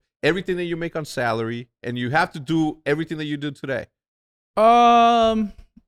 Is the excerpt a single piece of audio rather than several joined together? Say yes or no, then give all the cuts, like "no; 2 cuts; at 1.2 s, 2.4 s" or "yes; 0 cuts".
yes; 0 cuts